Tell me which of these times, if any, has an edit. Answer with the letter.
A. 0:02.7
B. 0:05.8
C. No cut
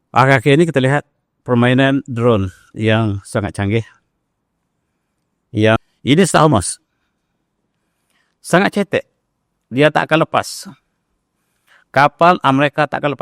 B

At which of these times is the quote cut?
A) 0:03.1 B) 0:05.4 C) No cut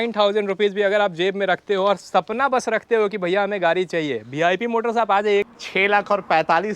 B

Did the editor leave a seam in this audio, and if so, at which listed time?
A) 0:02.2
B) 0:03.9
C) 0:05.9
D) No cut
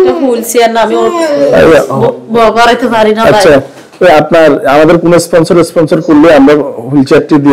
D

